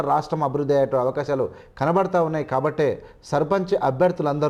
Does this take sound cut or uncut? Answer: uncut